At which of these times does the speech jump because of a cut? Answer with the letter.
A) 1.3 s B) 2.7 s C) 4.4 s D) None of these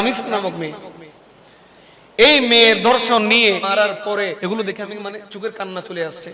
C